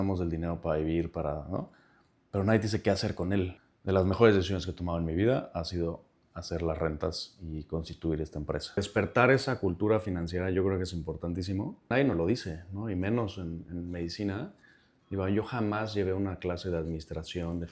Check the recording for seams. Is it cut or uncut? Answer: cut